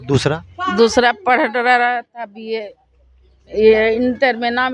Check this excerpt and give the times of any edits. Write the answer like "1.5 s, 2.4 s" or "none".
none